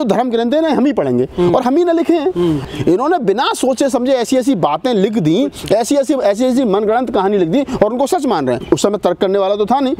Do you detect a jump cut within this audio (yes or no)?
yes